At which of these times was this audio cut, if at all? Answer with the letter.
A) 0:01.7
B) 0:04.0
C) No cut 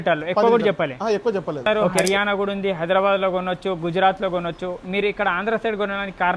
A